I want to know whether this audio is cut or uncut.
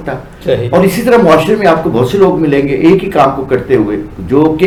uncut